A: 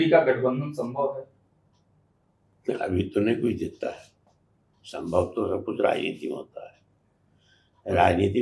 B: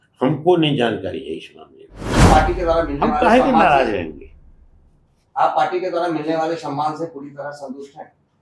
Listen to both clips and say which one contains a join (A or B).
B